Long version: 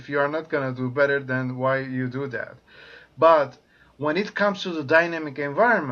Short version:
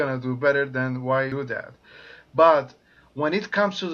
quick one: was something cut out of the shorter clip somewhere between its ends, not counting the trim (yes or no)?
yes